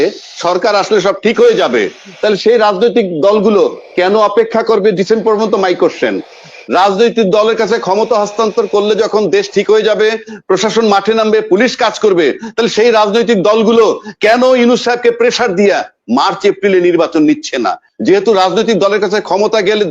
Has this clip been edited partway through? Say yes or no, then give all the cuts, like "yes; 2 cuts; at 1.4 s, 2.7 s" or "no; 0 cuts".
yes; 1 cut; at 17.8 s